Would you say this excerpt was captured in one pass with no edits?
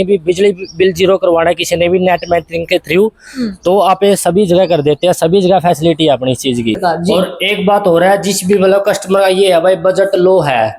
no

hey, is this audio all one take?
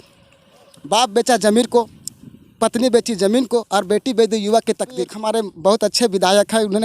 no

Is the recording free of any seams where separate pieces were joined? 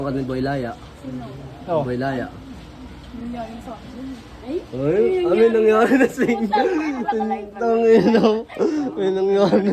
yes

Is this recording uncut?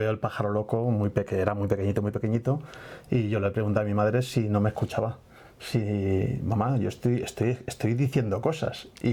yes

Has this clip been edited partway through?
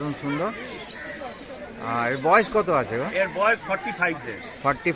no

